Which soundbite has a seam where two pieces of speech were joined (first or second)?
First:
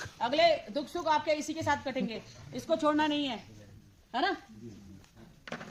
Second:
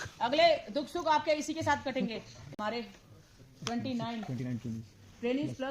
second